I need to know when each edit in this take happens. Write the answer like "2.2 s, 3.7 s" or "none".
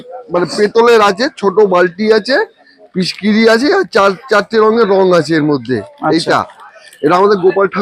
none

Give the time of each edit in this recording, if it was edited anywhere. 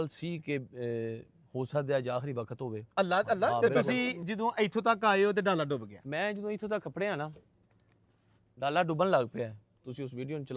3.6 s

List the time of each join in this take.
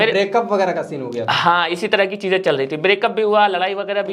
none

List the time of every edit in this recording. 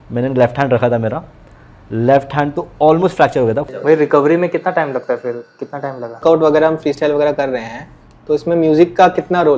3.6 s, 6.2 s

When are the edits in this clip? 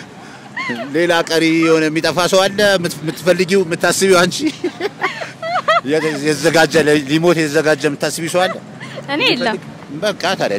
none

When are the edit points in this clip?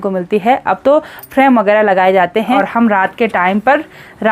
2.5 s

